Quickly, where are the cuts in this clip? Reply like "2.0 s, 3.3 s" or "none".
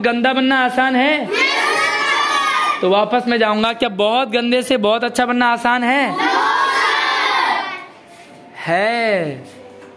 none